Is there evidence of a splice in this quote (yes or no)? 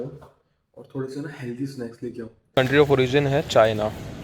yes